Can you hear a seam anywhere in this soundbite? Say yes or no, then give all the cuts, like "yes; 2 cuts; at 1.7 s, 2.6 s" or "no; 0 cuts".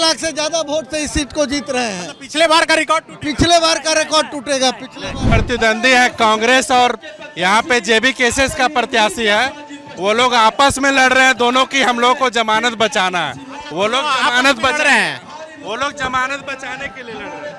yes; 1 cut; at 5.2 s